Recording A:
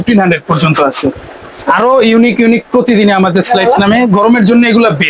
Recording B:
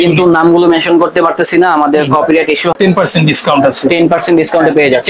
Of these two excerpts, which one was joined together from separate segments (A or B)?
B